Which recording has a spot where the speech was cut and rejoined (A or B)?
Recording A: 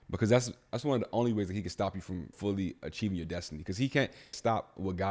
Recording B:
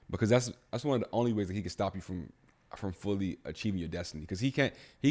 A